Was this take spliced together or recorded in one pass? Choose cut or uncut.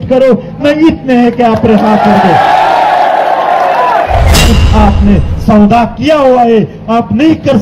cut